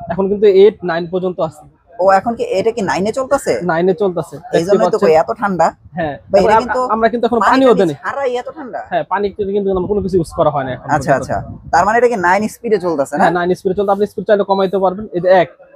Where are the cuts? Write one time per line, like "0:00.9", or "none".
none